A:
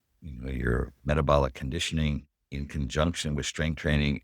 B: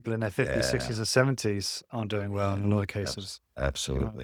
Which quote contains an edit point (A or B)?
A